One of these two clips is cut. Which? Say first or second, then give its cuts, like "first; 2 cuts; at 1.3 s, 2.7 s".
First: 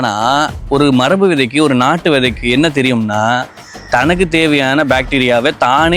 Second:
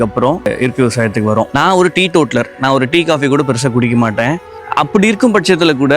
second; 2 cuts; at 1.5 s, 4.5 s